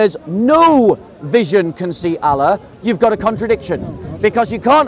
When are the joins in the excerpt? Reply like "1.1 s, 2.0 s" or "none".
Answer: none